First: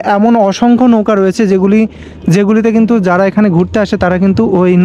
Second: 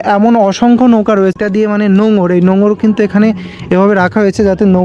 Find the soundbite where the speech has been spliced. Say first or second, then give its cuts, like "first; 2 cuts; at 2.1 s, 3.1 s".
second; 1 cut; at 1.4 s